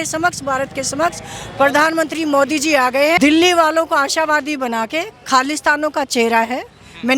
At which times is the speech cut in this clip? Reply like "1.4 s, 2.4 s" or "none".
3.2 s